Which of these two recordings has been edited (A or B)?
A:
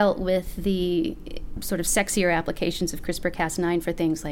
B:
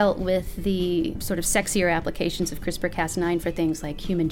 B